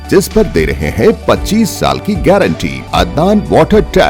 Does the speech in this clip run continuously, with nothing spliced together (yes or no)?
no